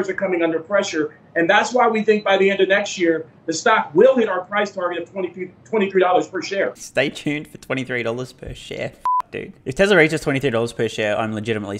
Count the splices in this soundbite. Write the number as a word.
zero